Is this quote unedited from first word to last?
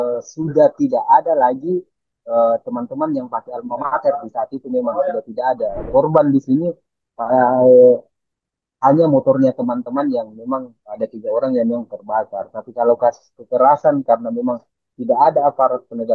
no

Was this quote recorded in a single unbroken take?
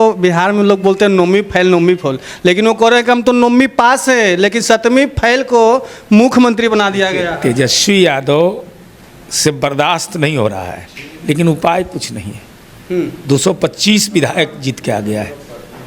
yes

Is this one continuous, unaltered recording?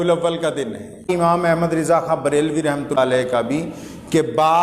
no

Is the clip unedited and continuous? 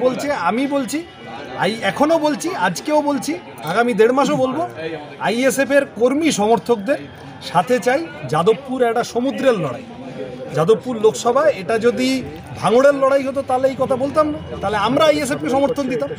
yes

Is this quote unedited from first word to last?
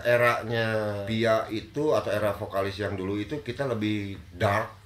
no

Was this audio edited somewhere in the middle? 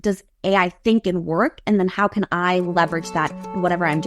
no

